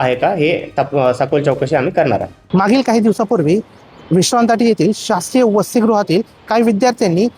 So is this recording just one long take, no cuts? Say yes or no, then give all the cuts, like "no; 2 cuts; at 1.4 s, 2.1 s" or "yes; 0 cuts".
no; 1 cut; at 2.4 s